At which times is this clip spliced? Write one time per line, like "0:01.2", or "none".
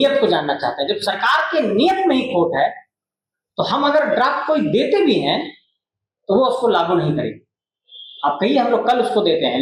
none